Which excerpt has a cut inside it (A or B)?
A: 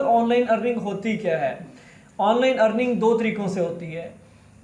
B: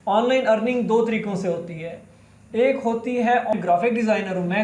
B